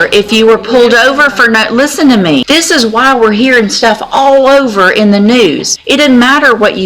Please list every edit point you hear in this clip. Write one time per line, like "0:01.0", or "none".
0:02.4
0:05.7